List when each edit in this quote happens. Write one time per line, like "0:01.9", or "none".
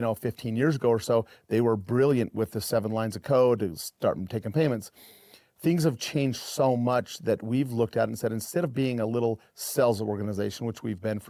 none